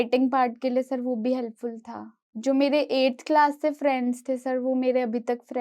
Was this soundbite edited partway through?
yes; 1 cut; at 2.2 s

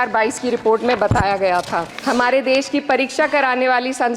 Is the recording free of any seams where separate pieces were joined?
no; 1 cut; at 1.9 s

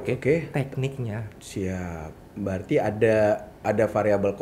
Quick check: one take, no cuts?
yes; 0 cuts

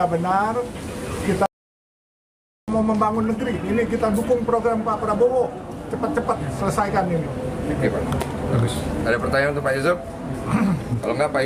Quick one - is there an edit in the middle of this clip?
no; 0 cuts

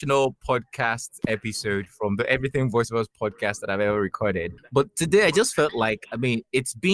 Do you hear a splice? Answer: yes; 1 cut; at 4.5 s

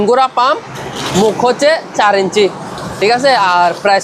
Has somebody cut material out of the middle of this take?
no; 0 cuts

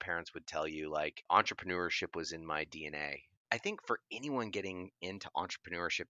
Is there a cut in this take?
yes; 2 cuts; at 1.2 s, 3.4 s

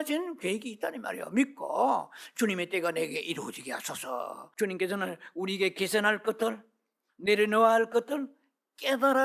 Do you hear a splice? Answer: yes; 1 cut; at 4.5 s

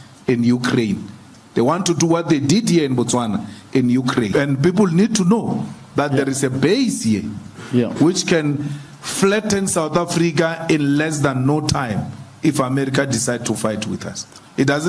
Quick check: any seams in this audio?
yes; 1 cut; at 4.3 s

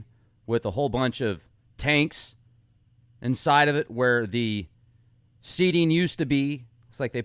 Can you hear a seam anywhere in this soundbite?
no; 0 cuts

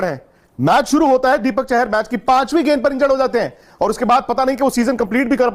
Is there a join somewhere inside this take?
no; 0 cuts

